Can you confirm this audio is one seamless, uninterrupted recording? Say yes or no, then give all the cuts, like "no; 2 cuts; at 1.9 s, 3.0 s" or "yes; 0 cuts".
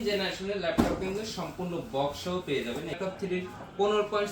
no; 1 cut; at 3.0 s